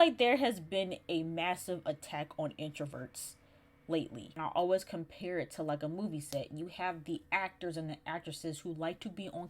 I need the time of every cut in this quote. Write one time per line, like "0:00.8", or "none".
0:04.3

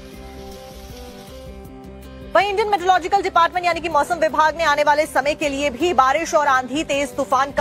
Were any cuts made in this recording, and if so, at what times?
0:06.3

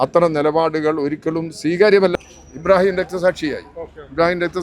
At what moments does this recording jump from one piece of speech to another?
0:02.1

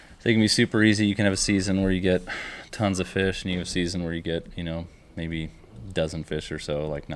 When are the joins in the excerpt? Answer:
none

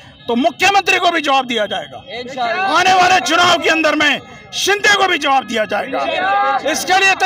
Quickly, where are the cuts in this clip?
0:01.9

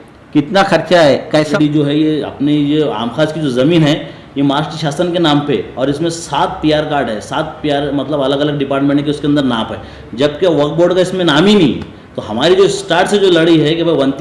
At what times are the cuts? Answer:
0:01.5

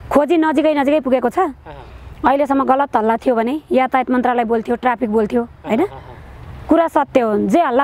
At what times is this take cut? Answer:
none

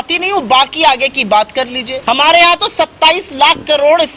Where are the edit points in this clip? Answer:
0:01.9

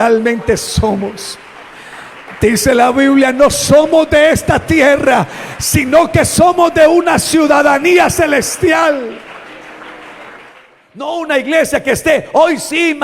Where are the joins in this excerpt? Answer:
0:11.1

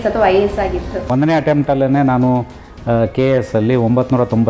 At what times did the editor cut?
0:00.9

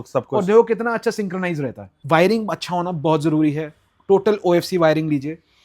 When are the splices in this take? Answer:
0:01.9

